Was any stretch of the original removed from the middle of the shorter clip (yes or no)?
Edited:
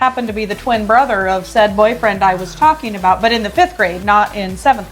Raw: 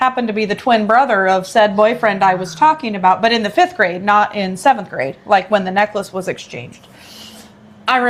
no